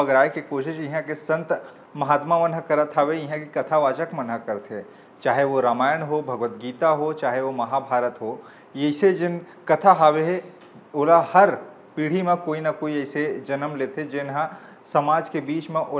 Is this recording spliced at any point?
no; 0 cuts

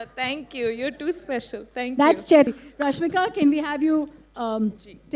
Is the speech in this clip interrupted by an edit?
no; 0 cuts

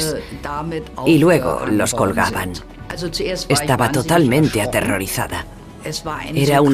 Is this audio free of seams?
yes; 0 cuts

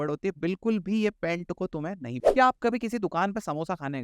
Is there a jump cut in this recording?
yes; 1 cut; at 2.2 s

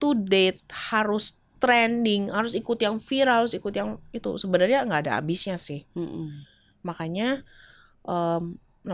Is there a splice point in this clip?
no; 0 cuts

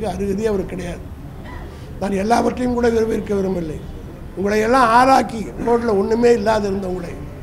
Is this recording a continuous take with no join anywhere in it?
yes; 0 cuts

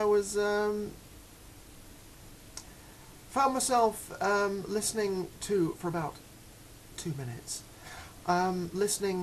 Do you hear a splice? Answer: yes; 1 cut; at 2.5 s

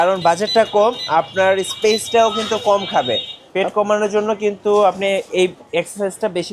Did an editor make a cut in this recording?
yes; 1 cut; at 3.4 s

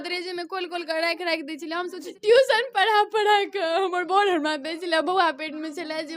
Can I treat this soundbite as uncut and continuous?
no; 1 cut; at 2.1 s

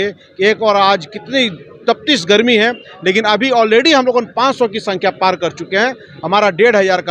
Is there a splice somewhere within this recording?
no; 0 cuts

